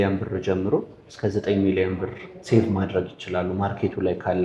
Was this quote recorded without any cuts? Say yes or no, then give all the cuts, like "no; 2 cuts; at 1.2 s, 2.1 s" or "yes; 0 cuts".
yes; 0 cuts